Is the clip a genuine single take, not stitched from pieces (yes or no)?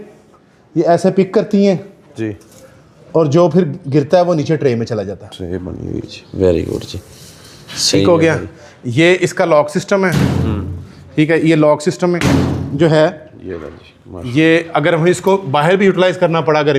yes